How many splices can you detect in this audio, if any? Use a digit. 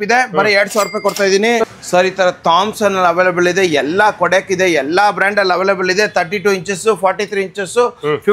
1